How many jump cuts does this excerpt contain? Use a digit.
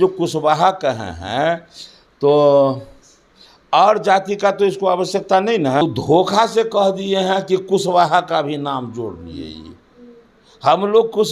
1